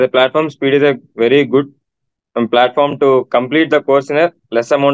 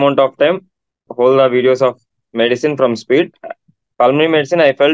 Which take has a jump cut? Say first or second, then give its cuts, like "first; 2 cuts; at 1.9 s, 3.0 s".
second; 2 cuts; at 1.1 s, 3.3 s